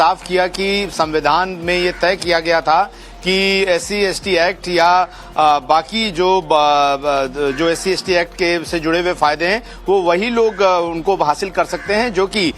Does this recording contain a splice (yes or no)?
yes